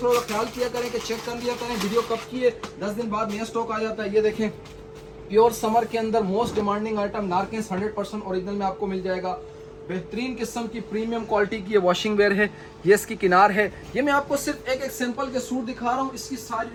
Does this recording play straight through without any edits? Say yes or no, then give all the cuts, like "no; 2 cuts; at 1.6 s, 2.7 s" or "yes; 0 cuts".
yes; 0 cuts